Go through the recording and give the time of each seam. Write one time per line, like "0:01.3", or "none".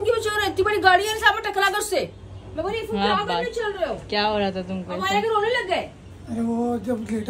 none